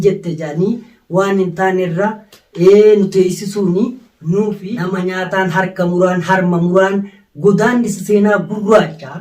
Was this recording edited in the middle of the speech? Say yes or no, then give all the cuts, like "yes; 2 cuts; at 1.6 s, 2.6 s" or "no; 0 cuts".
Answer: yes; 1 cut; at 4.7 s